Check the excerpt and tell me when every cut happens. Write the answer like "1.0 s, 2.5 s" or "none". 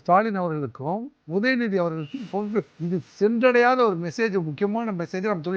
1.1 s, 2.8 s

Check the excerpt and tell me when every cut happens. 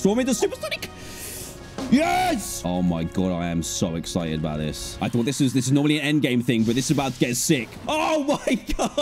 2.5 s, 4.9 s, 7.7 s

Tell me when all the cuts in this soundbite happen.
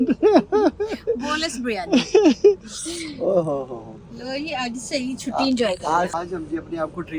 none

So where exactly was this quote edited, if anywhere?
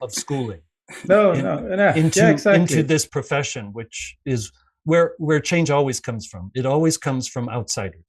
none

